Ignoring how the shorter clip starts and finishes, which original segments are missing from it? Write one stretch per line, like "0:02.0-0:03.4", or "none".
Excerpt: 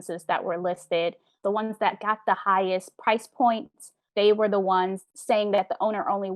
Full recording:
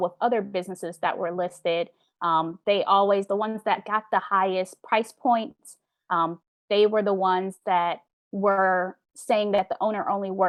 0:02.1-0:03.3
0:05.8-0:06.5
0:07.6-0:09.0